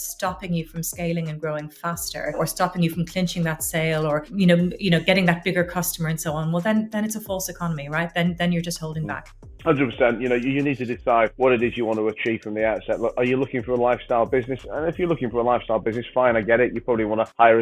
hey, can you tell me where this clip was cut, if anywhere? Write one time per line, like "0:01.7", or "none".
none